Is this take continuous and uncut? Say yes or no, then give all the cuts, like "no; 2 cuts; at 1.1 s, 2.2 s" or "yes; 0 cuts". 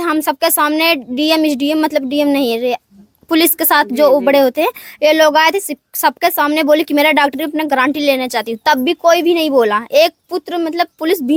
yes; 0 cuts